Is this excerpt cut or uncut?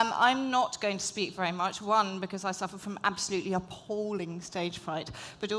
uncut